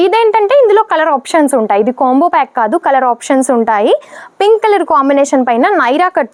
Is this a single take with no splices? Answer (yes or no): yes